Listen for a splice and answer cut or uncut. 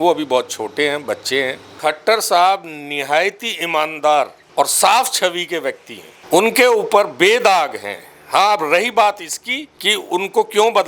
cut